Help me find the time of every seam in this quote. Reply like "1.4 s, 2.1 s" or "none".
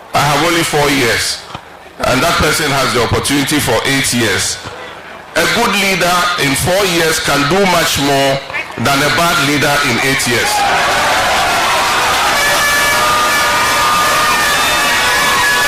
none